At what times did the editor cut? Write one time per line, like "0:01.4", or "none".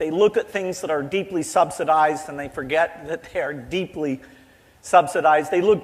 none